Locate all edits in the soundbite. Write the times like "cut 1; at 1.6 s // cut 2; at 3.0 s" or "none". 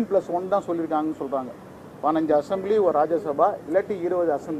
none